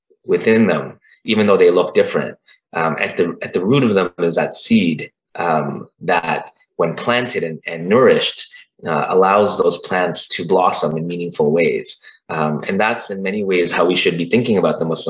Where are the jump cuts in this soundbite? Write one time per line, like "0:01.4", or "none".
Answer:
none